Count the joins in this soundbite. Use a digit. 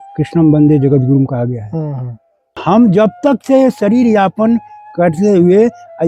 1